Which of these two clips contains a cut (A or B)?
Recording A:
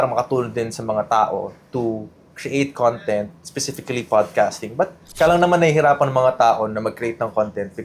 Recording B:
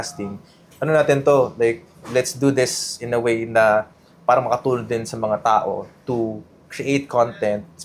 A